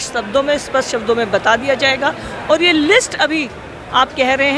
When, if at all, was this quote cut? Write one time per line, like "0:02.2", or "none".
none